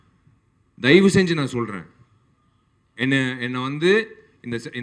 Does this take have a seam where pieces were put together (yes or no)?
no